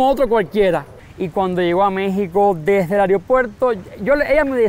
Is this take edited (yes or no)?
yes